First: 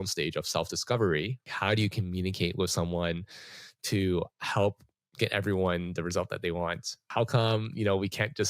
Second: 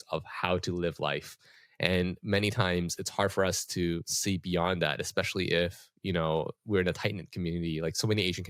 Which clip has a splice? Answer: first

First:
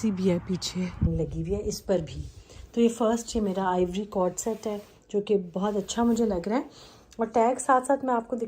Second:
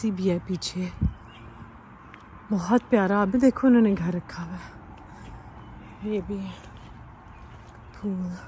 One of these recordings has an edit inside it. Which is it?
first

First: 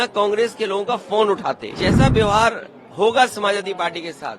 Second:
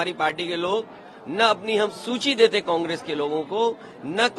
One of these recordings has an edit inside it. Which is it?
first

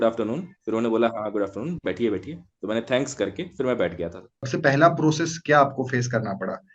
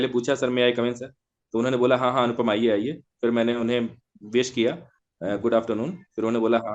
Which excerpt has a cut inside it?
first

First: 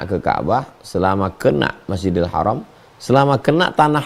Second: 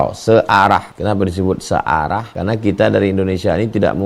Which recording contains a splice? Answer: second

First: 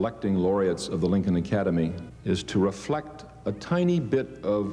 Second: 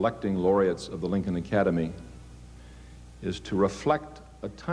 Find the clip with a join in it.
first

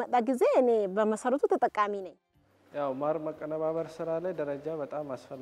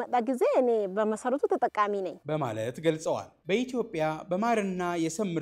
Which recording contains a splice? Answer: first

